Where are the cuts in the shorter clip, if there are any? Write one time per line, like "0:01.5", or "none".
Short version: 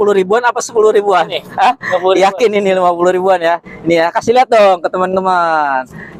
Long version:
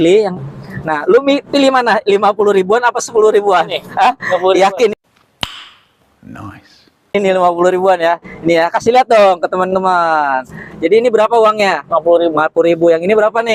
0:02.5